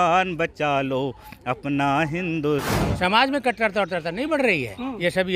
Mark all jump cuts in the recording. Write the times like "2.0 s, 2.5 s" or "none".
2.7 s